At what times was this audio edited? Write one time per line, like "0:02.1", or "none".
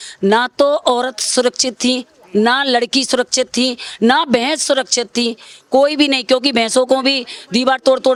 none